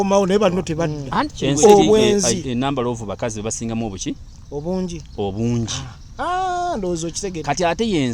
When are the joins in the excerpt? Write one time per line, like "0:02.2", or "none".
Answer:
0:02.2